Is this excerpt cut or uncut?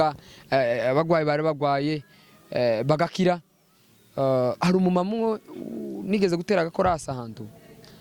uncut